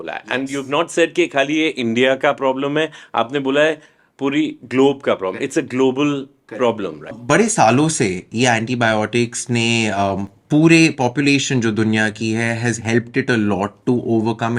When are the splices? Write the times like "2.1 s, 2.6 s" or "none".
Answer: 7.2 s